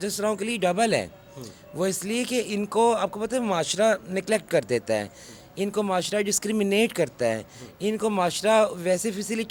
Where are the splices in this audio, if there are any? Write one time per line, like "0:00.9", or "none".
none